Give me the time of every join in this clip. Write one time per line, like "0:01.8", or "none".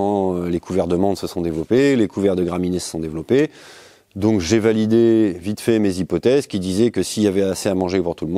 none